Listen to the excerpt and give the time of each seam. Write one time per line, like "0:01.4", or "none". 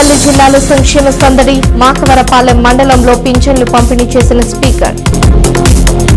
none